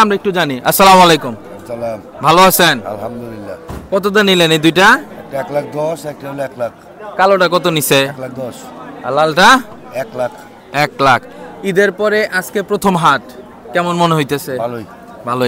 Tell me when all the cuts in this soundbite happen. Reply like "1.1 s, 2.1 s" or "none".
none